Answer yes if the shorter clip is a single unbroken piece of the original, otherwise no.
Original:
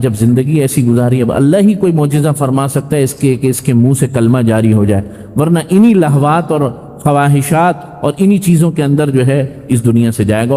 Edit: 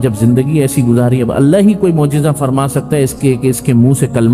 yes